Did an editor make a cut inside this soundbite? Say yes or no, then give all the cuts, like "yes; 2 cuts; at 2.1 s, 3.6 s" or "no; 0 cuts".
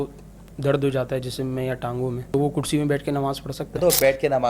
yes; 2 cuts; at 2.3 s, 3.8 s